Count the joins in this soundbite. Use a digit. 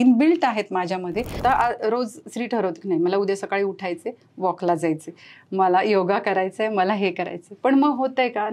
1